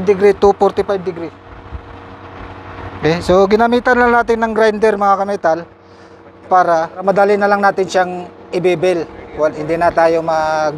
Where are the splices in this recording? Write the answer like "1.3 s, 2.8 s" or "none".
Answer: 6.9 s